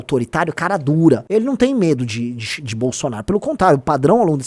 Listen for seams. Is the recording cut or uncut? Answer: cut